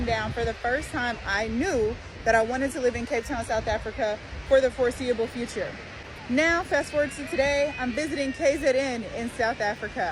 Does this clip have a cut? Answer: no; 0 cuts

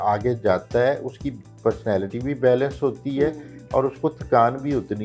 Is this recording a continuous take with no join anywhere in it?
yes; 0 cuts

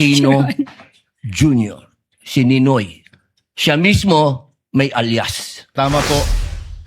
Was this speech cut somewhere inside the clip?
yes; 1 cut; at 5.6 s

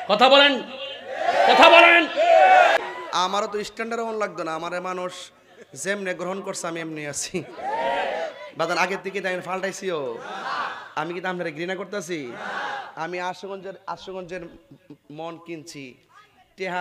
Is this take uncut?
no; 1 cut; at 2.8 s

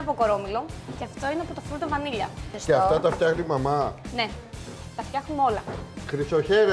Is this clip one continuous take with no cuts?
no; 2 cuts; at 1.1 s, 2.6 s

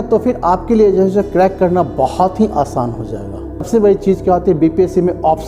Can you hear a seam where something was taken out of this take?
yes; 1 cut; at 3.7 s

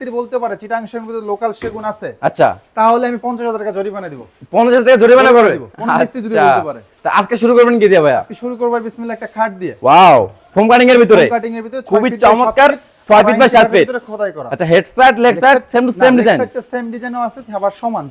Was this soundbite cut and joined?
no; 0 cuts

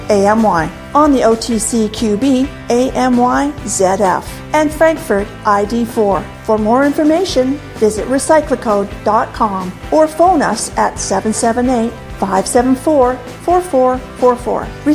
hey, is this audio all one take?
yes; 0 cuts

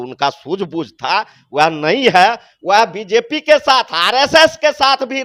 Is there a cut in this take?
no; 0 cuts

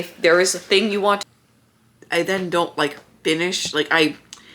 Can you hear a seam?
yes; 1 cut; at 1.2 s

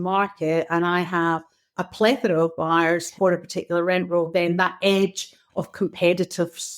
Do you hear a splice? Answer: yes; 2 cuts; at 1.7 s, 3.1 s

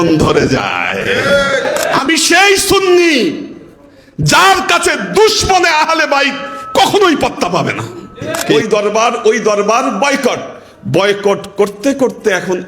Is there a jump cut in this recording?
yes; 2 cuts; at 1.9 s, 8.5 s

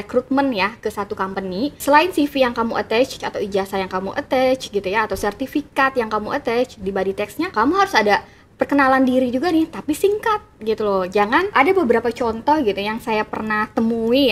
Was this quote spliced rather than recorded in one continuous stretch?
yes; 4 cuts; at 1.7 s, 3.2 s, 7.5 s, 11.5 s

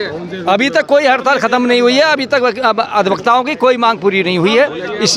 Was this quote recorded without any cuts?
yes; 0 cuts

